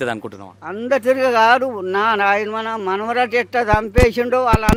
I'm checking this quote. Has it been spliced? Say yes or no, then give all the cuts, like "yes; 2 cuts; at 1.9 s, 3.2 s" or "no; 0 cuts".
no; 0 cuts